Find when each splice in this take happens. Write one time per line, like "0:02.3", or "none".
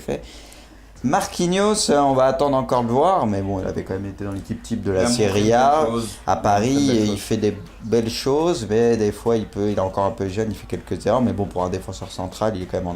0:08.4